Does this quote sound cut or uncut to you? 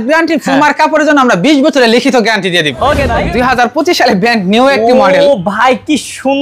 cut